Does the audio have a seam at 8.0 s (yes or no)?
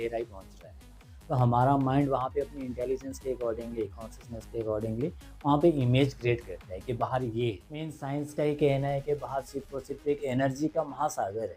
yes